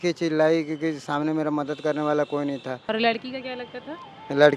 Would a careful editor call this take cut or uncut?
cut